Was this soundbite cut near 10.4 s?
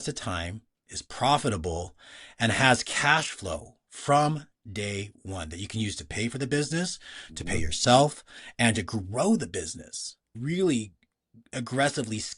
yes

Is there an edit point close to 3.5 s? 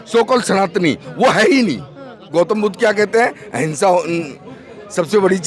no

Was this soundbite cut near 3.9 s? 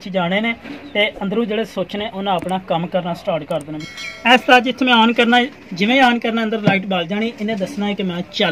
yes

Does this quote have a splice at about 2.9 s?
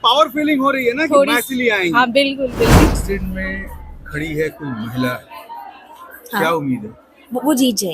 yes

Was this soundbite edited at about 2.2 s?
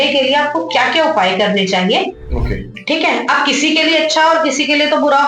yes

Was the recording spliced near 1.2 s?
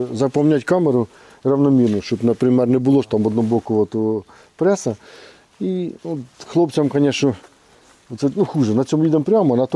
no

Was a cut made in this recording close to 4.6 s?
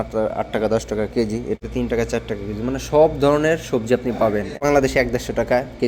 yes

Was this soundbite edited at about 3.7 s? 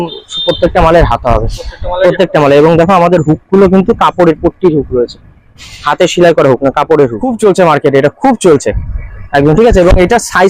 no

